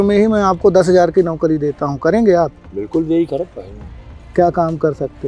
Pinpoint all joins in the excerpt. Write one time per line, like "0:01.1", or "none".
none